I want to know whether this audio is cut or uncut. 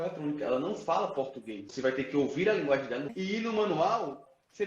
cut